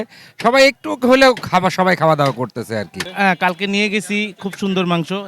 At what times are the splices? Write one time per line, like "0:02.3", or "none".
0:03.0